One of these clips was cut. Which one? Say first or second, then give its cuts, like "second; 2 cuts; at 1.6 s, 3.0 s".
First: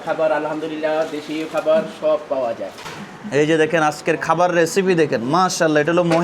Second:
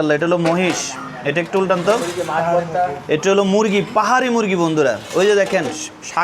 first; 1 cut; at 2.8 s